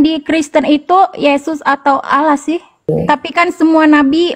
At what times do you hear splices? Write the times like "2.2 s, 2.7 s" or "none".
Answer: 2.9 s

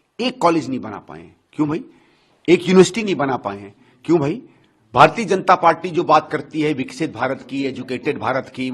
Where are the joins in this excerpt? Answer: none

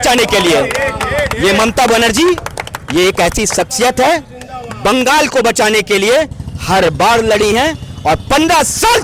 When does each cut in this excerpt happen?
none

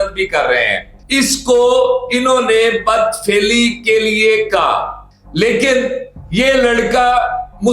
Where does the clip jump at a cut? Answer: 1.0 s

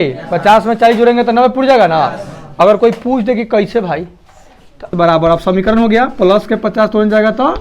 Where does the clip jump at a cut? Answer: 4.9 s

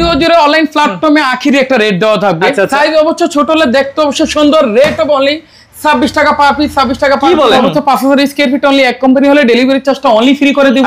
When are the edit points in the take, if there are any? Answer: 7.5 s

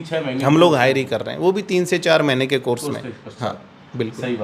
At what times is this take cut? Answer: none

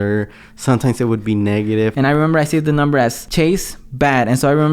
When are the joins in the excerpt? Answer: 1.9 s, 3.2 s

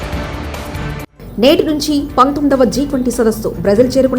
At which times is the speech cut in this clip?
1.1 s

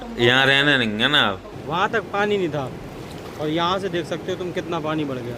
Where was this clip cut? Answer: 1.5 s

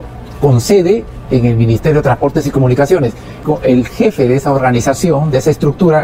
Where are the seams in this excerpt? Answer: 3.4 s

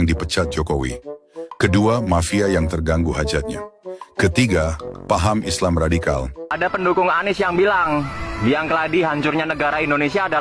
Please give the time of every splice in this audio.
6.8 s

